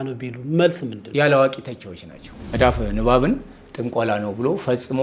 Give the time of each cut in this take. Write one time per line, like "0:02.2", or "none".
0:00.9
0:02.4

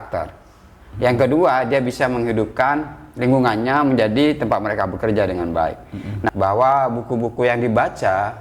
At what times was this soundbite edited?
0:06.3

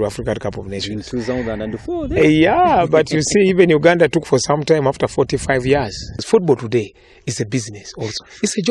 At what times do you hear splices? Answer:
0:06.3

